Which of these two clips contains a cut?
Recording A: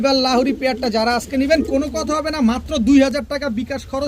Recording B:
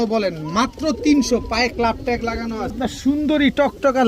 B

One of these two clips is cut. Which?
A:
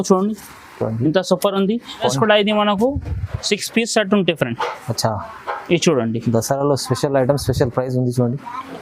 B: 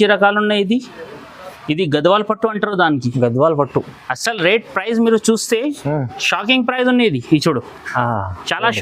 A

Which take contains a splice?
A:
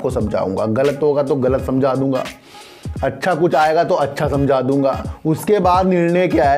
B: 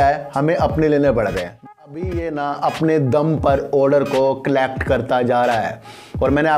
B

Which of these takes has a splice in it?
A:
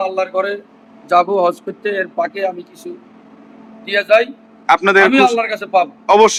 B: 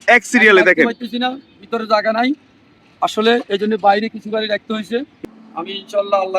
B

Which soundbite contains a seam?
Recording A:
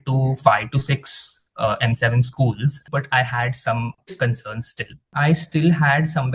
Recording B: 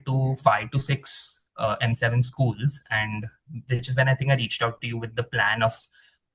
A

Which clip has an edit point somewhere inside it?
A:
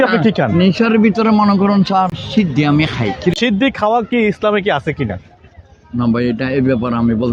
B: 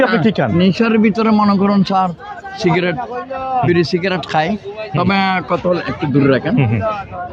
A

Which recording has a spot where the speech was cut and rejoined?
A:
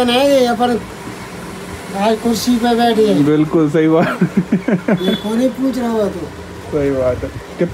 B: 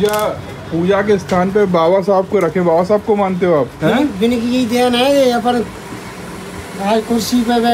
B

